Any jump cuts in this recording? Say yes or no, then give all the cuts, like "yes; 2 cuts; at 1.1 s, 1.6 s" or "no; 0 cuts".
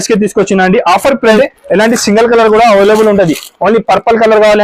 yes; 1 cut; at 1.4 s